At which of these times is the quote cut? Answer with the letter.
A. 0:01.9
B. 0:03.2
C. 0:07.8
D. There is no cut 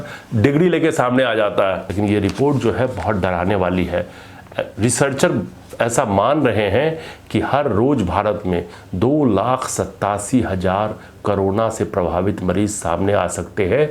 A